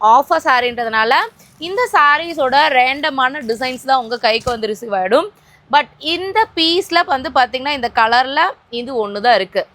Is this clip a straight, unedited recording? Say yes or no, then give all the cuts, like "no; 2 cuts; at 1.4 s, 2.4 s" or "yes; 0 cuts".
yes; 0 cuts